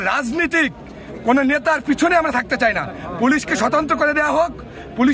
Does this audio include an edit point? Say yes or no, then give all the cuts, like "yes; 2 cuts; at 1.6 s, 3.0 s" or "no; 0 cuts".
no; 0 cuts